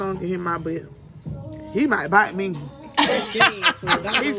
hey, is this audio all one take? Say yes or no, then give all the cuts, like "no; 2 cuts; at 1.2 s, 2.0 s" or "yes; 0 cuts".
yes; 0 cuts